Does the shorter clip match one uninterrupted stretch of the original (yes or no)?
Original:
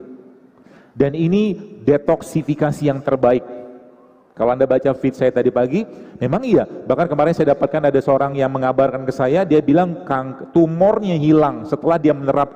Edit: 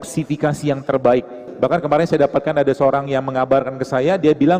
no